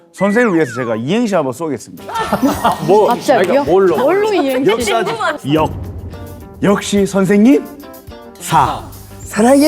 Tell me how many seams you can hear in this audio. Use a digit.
1